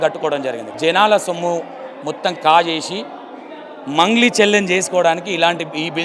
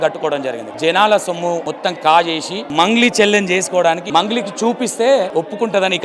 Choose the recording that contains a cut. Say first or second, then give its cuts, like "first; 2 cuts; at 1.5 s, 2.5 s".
second; 4 cuts; at 1.7 s, 2.6 s, 4.0 s, 5.3 s